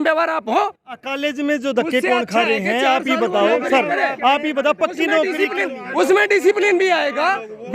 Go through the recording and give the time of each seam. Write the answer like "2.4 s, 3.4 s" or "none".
none